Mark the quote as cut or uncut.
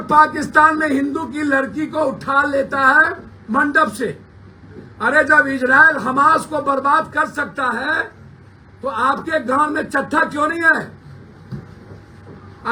uncut